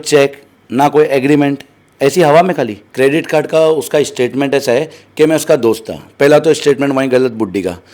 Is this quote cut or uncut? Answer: cut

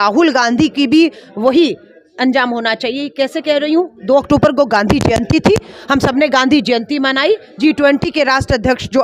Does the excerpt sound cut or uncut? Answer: uncut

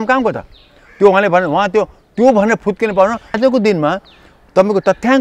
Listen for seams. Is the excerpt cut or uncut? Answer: cut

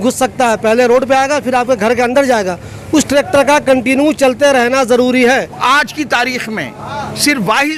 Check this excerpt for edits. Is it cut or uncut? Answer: cut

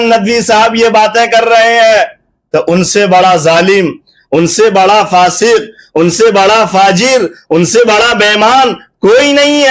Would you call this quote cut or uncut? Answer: uncut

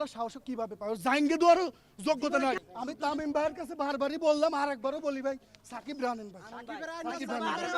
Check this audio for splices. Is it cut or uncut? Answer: cut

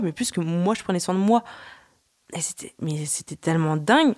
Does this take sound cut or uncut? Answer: uncut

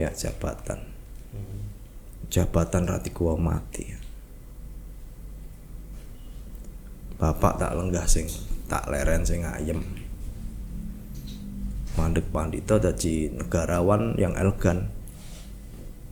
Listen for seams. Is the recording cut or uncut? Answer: uncut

